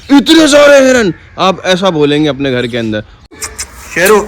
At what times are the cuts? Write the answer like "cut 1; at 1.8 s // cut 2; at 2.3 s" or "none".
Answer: cut 1; at 3.3 s